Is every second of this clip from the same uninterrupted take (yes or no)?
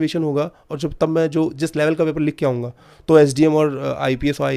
yes